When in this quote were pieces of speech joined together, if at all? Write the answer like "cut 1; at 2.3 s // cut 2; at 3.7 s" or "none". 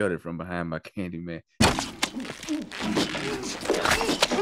cut 1; at 1.6 s